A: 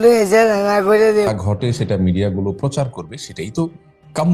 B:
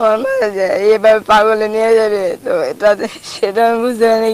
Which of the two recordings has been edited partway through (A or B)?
A